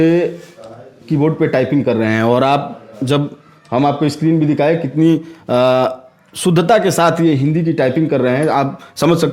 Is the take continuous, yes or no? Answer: yes